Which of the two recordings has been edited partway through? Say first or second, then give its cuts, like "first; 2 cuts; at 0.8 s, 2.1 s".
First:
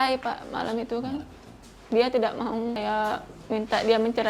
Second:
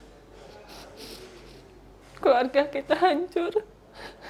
first; 1 cut; at 2.8 s